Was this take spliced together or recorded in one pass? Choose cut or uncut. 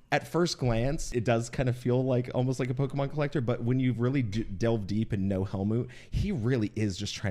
cut